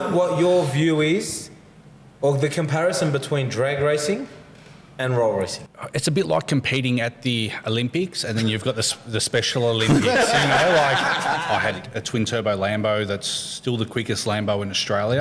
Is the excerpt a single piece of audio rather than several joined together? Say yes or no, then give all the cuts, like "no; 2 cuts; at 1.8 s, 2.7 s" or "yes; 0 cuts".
no; 2 cuts; at 5.6 s, 11.4 s